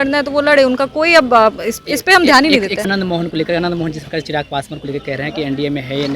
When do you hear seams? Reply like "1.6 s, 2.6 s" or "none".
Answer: 2.8 s

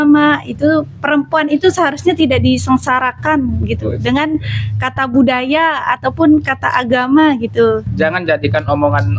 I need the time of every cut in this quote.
7.9 s

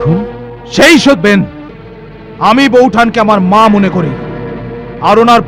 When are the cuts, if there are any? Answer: 1.2 s

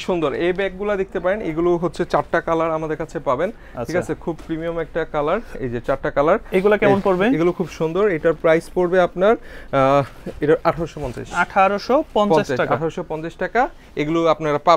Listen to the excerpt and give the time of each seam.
none

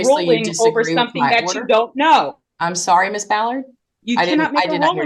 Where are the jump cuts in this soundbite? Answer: none

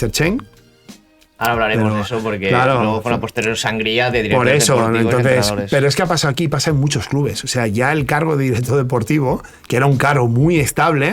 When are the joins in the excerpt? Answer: none

